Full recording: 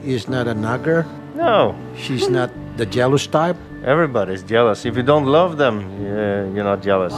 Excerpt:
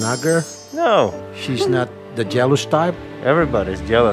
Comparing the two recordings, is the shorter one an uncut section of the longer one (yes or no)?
yes